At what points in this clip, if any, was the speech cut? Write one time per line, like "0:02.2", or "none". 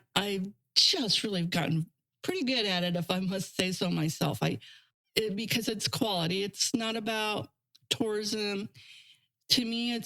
0:04.9